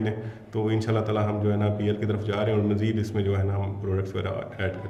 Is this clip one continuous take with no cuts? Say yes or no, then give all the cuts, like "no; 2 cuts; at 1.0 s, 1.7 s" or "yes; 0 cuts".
yes; 0 cuts